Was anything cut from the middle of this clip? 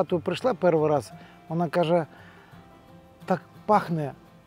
no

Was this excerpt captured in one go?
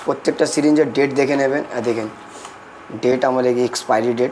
yes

